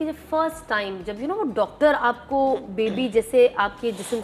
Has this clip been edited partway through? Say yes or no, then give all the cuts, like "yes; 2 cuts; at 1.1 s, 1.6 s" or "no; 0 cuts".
no; 0 cuts